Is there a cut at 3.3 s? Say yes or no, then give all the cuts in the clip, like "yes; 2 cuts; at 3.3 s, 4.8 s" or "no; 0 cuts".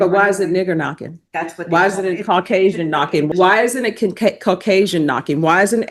yes; 1 cut; at 3.3 s